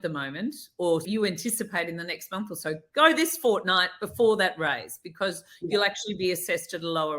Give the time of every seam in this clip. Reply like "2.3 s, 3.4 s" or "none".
1.0 s